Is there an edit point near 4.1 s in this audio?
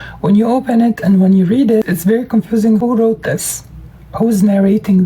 no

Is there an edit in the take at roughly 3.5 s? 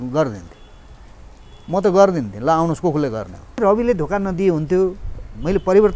yes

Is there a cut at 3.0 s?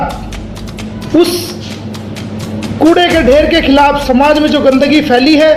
no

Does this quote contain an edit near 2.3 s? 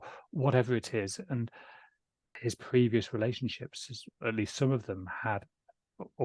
yes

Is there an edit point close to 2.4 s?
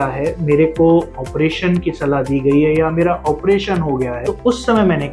no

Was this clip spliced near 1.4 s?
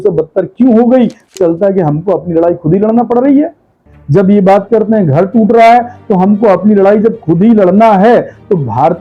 yes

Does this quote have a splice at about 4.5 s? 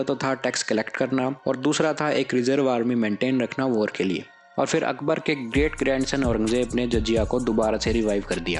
yes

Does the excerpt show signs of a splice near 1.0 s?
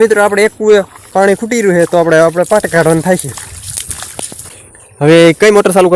yes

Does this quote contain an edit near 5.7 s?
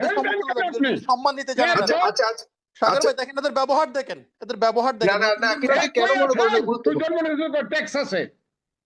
yes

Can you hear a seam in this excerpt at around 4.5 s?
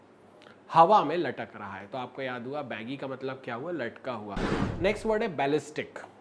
yes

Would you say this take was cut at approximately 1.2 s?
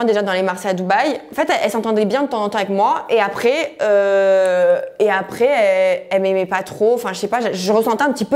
no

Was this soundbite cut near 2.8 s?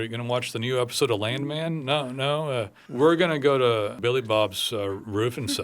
yes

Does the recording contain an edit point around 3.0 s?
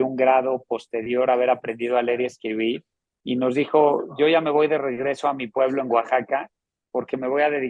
no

